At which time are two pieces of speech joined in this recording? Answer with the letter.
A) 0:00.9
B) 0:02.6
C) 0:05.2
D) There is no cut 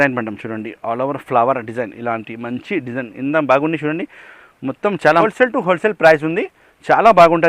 C